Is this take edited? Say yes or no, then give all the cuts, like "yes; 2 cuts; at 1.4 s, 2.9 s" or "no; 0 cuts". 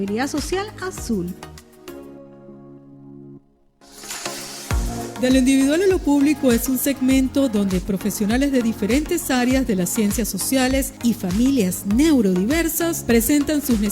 yes; 2 cuts; at 1.5 s, 4.0 s